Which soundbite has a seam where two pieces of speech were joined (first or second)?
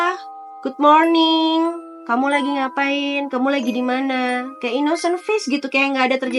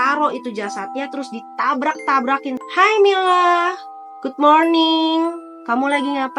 second